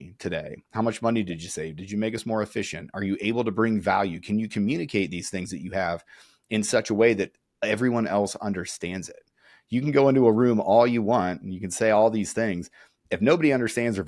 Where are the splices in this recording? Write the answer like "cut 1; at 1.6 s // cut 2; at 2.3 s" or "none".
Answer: none